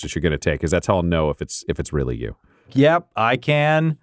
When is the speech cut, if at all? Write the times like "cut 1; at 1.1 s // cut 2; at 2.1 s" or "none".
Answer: cut 1; at 2.7 s